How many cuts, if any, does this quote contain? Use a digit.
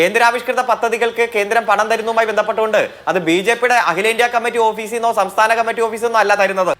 0